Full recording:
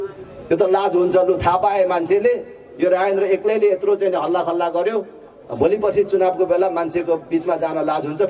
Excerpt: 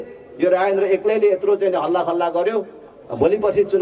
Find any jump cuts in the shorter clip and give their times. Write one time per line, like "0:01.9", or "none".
none